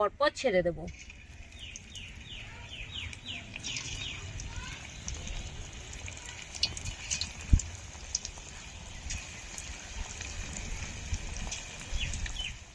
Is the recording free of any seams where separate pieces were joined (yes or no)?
yes